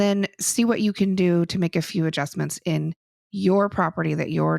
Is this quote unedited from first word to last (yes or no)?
yes